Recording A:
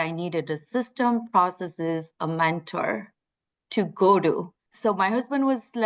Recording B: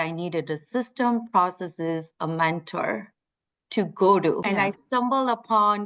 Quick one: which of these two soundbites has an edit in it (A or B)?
B